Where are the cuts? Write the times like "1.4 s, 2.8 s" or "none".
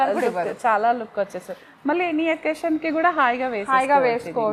none